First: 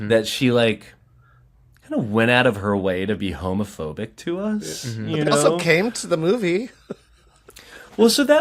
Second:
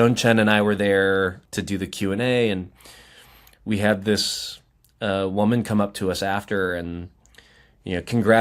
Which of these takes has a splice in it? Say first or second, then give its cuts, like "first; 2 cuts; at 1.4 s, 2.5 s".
second; 1 cut; at 1.4 s